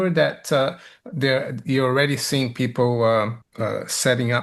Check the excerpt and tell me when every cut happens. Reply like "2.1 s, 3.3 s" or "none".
3.4 s